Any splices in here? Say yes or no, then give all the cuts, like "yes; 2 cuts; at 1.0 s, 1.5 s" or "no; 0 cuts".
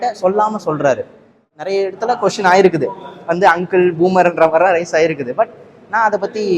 yes; 1 cut; at 1.5 s